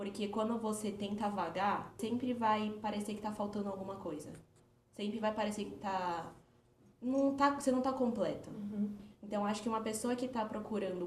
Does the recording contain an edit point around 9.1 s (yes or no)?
yes